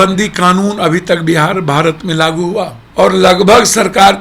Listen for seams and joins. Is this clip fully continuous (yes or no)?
no